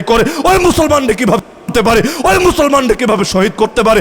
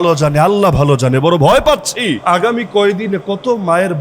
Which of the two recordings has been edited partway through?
second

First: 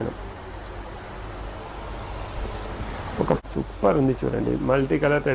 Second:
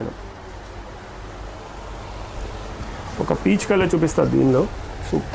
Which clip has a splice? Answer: first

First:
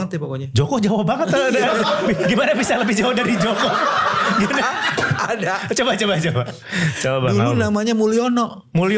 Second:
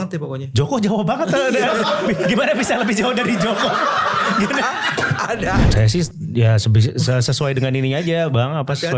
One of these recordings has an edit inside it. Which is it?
second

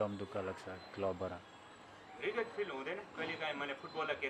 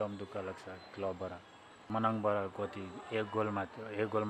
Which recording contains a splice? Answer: second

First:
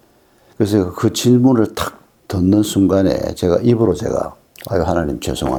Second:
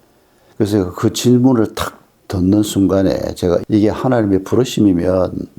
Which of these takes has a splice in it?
second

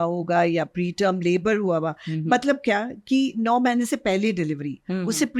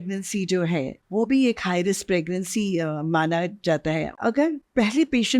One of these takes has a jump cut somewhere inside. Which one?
second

